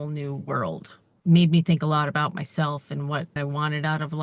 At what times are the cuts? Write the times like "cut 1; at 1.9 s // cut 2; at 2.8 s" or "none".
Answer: cut 1; at 1.1 s // cut 2; at 3.4 s